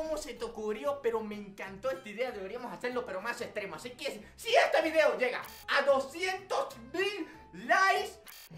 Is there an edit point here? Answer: no; 0 cuts

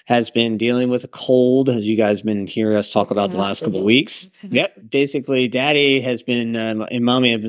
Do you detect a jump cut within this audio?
yes; 1 cut; at 4.8 s

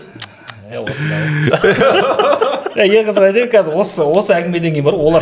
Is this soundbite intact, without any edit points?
yes; 0 cuts

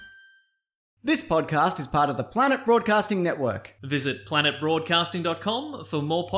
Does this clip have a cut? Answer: yes; 1 cut; at 0.9 s

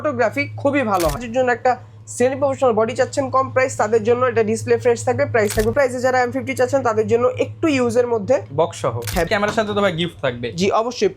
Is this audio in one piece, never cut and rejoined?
no; 3 cuts; at 1.2 s, 5.7 s, 9.3 s

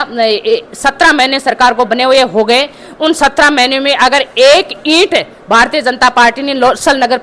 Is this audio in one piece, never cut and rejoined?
yes; 0 cuts

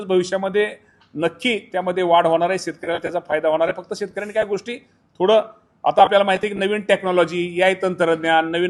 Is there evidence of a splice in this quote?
no; 0 cuts

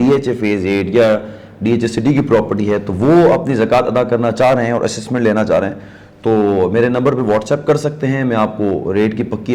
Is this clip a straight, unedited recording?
yes; 0 cuts

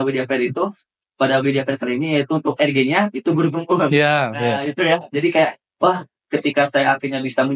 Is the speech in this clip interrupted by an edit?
no; 0 cuts

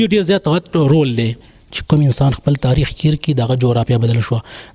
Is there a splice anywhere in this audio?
yes; 1 cut; at 1.4 s

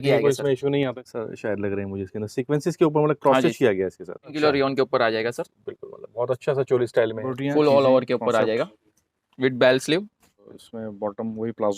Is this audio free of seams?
no; 4 cuts; at 1.0 s, 4.4 s, 7.3 s, 10.6 s

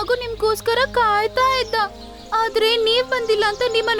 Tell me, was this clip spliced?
no; 0 cuts

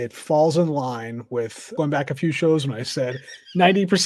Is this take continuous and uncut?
no; 1 cut; at 1.7 s

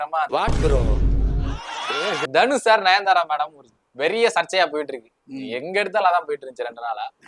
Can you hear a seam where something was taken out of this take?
yes; 1 cut; at 2.3 s

